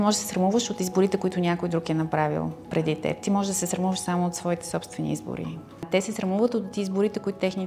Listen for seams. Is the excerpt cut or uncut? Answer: cut